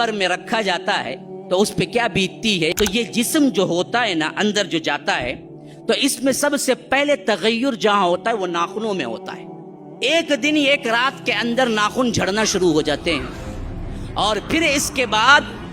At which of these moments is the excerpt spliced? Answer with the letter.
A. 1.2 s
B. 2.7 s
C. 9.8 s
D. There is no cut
B